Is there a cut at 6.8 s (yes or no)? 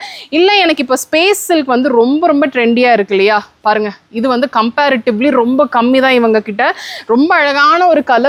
no